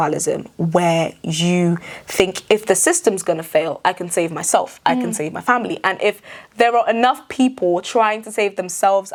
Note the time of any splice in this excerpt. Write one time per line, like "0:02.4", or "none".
none